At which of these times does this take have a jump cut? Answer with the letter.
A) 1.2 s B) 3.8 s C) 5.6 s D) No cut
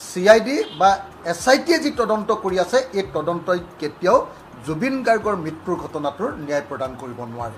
D